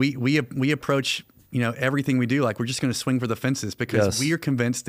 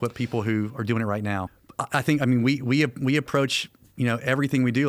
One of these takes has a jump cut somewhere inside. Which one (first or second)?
second